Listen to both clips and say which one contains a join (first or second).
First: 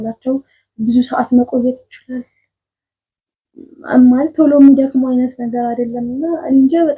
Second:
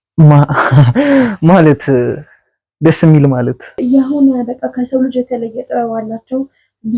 second